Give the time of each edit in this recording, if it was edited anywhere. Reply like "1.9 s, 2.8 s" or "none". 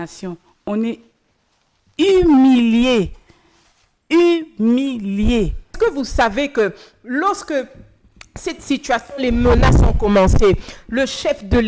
5.7 s